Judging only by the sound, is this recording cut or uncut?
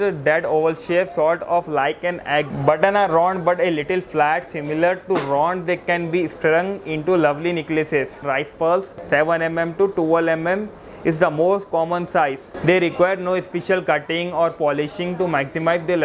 cut